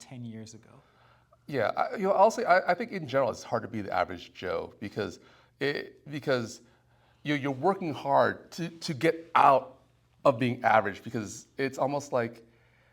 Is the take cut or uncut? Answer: uncut